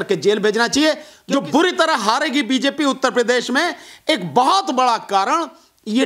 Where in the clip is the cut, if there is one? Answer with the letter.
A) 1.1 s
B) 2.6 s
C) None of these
A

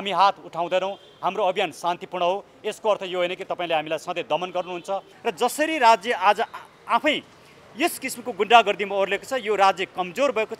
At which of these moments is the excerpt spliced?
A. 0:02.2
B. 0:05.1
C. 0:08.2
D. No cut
B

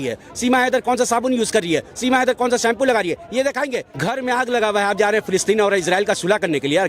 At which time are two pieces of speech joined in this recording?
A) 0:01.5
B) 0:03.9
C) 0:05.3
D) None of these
B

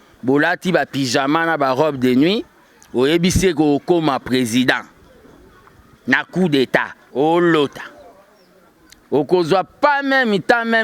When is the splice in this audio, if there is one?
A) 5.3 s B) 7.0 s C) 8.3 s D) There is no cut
B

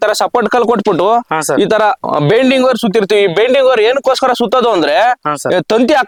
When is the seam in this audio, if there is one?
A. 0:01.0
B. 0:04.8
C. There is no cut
C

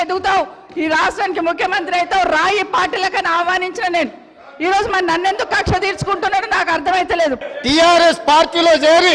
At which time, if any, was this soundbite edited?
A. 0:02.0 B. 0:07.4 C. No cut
B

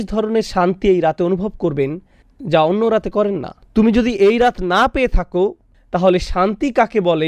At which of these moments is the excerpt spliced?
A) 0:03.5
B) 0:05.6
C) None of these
A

